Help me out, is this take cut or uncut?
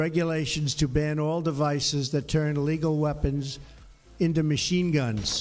uncut